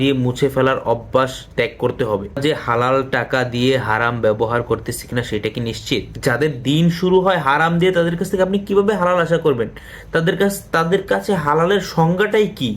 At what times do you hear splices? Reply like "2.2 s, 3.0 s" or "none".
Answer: 2.4 s, 6.1 s